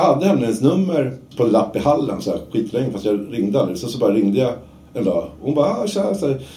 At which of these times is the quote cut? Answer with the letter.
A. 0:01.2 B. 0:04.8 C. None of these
A